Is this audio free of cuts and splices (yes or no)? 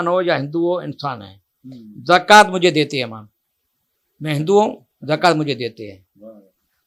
yes